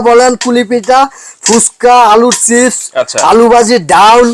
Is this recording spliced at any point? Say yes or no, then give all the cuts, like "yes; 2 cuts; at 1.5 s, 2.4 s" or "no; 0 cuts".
no; 0 cuts